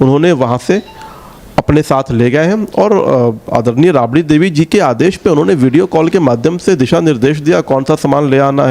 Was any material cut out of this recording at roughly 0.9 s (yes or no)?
no